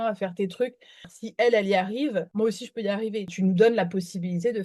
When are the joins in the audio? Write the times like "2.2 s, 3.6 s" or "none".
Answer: 1.2 s, 2.3 s, 3.3 s